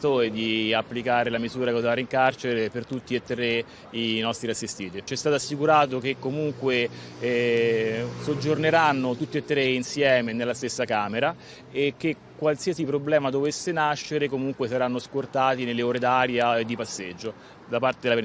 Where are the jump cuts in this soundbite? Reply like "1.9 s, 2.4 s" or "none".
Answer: 5.0 s